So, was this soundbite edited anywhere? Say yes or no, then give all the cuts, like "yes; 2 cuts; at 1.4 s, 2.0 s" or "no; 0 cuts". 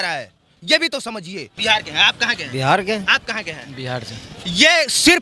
yes; 1 cut; at 1.5 s